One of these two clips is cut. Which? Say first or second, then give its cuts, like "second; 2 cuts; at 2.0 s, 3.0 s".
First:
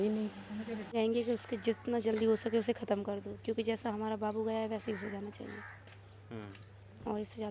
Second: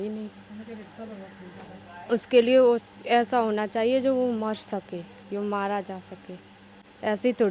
first; 1 cut; at 0.9 s